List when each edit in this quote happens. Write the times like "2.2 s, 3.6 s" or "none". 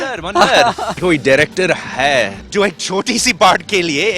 1.0 s, 2.4 s

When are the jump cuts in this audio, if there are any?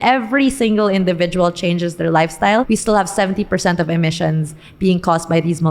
2.7 s

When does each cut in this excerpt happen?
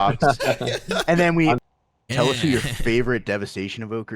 1.6 s

